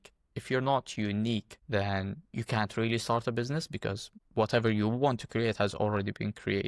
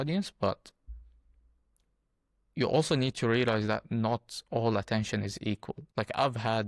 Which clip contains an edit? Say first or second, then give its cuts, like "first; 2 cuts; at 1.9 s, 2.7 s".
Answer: first; 1 cut; at 1.6 s